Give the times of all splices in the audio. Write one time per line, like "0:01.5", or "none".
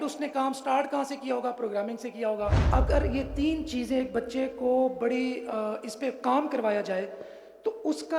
0:02.6